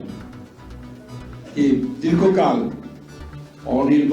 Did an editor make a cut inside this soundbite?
yes; 1 cut; at 2.7 s

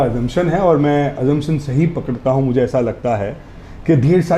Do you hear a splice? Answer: no; 0 cuts

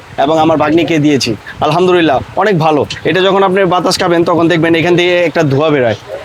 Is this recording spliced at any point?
no; 0 cuts

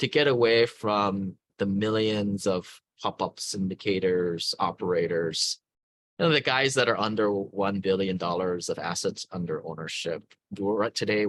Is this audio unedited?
yes; 0 cuts

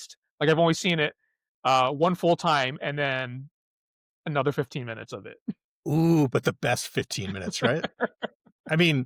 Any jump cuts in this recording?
no; 0 cuts

